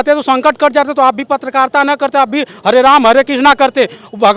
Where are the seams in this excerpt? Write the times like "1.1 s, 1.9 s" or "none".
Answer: none

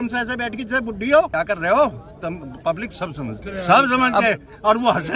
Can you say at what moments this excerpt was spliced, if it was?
1.3 s, 3.4 s

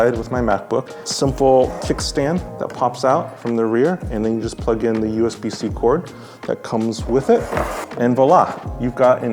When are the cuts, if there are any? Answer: 1.0 s, 7.8 s

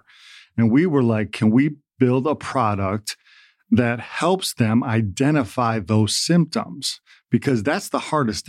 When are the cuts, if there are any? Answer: none

